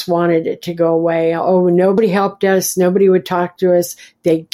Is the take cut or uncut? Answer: cut